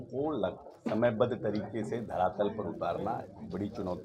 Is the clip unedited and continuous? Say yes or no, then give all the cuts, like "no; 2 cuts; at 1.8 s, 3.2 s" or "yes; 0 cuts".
yes; 0 cuts